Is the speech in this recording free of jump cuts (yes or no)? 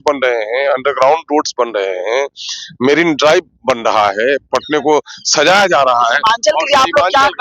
yes